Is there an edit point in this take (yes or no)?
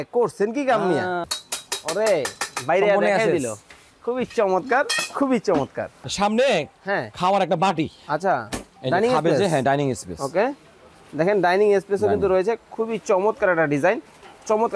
yes